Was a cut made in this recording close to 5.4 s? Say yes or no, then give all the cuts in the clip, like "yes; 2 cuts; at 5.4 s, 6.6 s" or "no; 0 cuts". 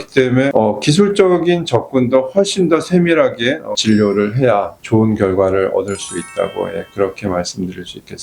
no; 1 cut; at 3.7 s